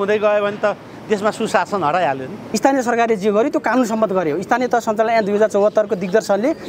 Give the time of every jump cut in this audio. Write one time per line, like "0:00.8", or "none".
0:02.4